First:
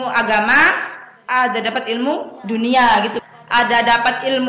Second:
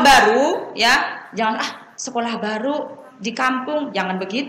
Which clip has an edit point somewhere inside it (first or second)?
first